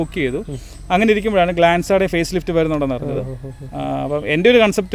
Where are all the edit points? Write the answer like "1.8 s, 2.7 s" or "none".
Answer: none